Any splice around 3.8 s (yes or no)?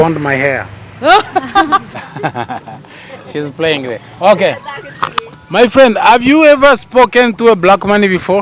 no